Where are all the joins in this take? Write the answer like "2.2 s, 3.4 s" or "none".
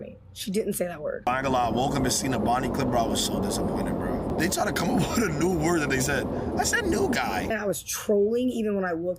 1.2 s, 4.3 s, 7.5 s

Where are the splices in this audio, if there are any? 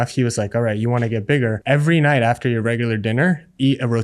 1.6 s

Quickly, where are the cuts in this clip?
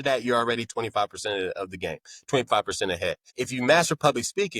3.2 s

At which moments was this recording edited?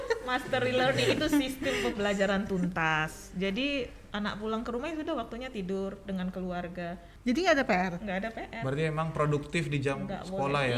7.1 s

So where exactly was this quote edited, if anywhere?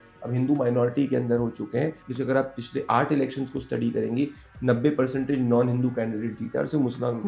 2.0 s

